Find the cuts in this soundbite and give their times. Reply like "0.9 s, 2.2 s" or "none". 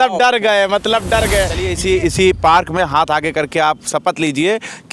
1.6 s